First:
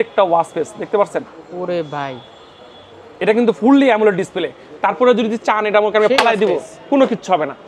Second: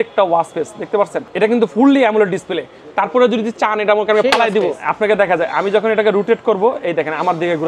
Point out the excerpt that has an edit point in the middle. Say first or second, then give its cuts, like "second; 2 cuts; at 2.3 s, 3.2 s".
second; 2 cuts; at 1.2 s, 4.8 s